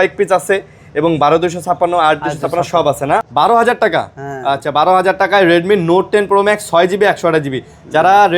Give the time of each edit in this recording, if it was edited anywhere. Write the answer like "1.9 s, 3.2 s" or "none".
3.3 s